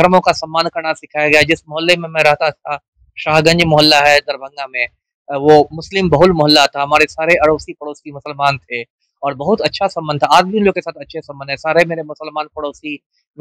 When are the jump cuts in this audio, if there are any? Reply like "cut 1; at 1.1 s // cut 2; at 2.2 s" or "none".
none